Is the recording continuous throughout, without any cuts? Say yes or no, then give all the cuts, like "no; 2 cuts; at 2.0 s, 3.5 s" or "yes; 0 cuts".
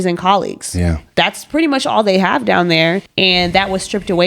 no; 1 cut; at 3.1 s